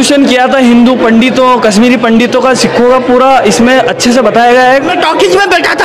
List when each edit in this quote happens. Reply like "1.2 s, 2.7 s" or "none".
4.9 s